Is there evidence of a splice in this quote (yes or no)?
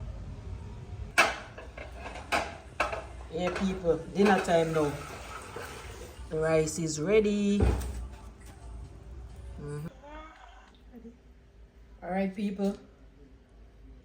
yes